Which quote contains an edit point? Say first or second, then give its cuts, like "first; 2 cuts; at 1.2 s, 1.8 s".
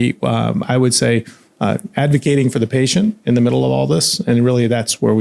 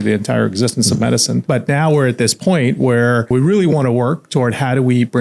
second; 2 cuts; at 1.4 s, 3.3 s